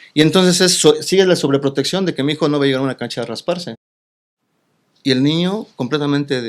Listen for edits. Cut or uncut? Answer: cut